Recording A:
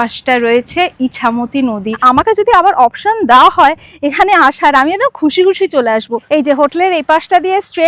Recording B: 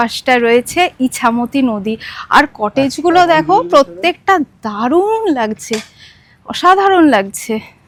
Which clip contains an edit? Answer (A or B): A